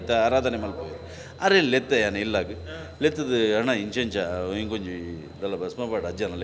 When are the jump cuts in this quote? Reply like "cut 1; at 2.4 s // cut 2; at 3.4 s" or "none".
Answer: none